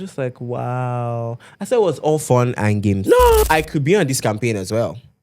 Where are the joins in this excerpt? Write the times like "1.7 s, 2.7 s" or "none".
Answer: 3.4 s